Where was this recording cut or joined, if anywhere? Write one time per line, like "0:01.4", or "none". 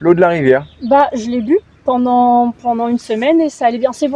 none